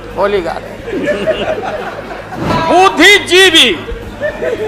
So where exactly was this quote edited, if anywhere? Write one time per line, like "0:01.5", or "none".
0:02.5